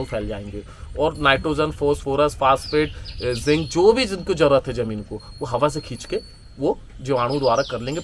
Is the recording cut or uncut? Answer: uncut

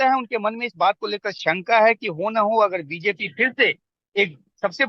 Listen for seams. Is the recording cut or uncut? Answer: uncut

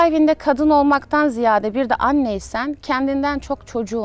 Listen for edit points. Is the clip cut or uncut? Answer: uncut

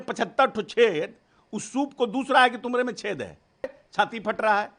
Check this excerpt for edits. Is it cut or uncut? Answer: cut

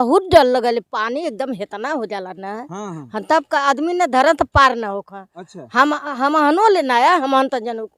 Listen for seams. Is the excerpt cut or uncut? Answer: uncut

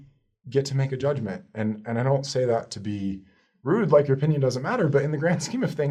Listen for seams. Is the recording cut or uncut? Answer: uncut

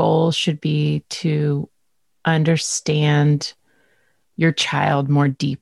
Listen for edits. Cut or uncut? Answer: uncut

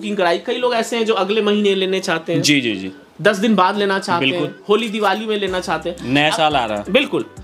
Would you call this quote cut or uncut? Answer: uncut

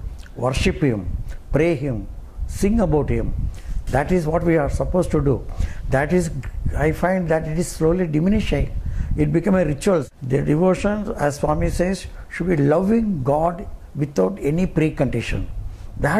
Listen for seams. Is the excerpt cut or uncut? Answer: cut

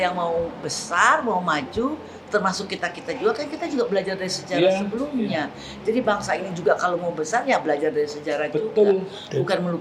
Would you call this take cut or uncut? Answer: uncut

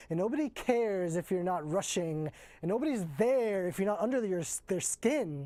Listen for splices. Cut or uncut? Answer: uncut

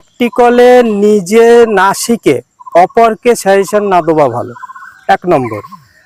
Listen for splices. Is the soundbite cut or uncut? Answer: uncut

